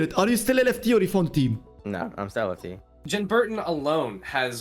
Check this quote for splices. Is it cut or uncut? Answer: cut